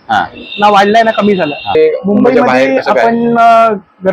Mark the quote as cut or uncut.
cut